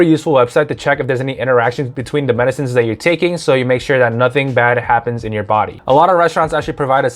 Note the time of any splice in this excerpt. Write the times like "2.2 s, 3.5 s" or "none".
1.9 s, 5.8 s